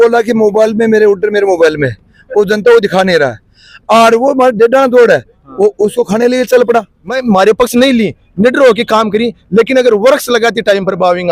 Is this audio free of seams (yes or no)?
no